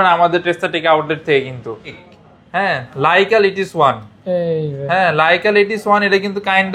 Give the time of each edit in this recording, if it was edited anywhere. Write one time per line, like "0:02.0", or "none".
0:02.0